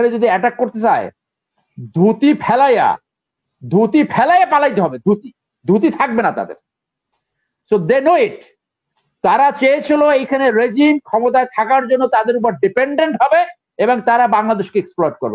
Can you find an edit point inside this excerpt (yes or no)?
no